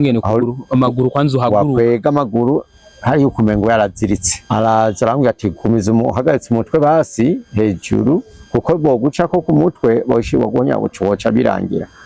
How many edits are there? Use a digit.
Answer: 1